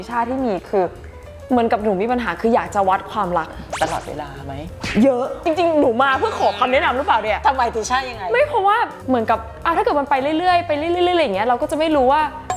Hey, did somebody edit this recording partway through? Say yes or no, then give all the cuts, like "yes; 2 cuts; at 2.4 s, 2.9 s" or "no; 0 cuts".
no; 0 cuts